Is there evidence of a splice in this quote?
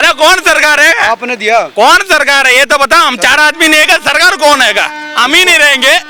no; 0 cuts

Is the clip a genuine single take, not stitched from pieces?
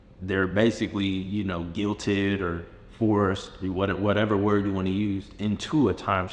yes; 0 cuts

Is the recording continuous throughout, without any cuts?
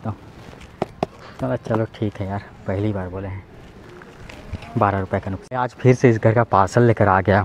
no; 1 cut; at 5.4 s

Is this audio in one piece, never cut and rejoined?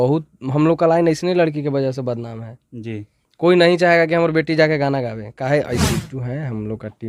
no; 1 cut; at 5.8 s

